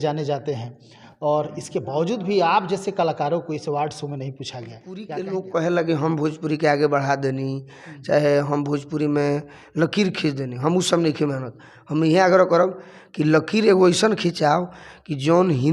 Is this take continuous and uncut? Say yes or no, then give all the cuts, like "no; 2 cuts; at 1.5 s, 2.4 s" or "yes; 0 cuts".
no; 1 cut; at 5.1 s